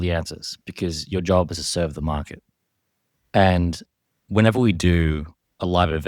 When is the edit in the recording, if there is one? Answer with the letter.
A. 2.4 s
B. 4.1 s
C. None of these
C